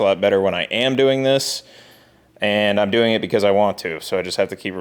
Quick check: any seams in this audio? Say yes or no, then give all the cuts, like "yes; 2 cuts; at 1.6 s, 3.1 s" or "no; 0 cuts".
no; 0 cuts